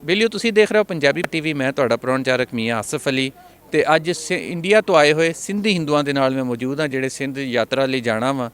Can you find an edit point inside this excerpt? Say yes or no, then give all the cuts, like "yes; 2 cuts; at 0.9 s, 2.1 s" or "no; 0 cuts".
yes; 1 cut; at 1.3 s